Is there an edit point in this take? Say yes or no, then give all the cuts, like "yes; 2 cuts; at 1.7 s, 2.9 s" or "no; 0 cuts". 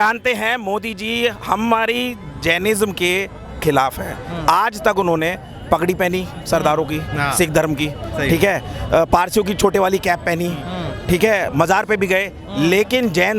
no; 0 cuts